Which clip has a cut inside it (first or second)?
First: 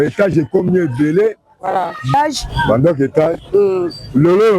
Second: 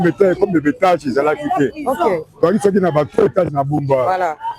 first